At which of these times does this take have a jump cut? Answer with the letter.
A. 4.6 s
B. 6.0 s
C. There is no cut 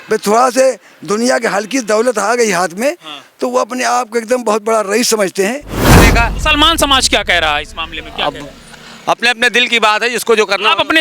B